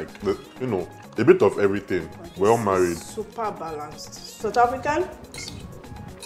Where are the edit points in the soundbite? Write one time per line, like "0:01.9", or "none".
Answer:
0:04.4

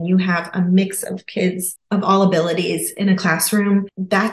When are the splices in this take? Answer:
none

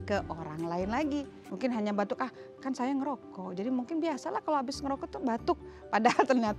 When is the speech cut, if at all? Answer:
0:01.4

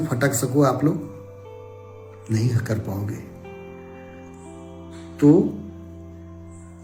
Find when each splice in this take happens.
none

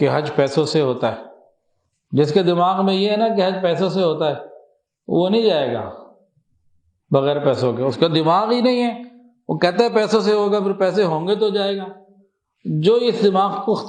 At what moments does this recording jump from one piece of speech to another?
none

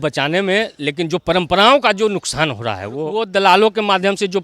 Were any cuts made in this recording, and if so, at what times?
0:03.1

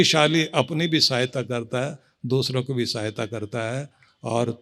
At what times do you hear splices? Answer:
none

